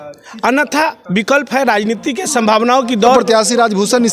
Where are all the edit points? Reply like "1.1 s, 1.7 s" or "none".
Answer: 3.2 s